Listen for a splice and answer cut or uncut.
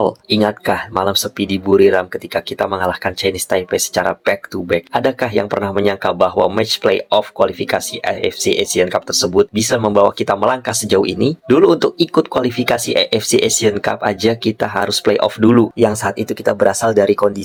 uncut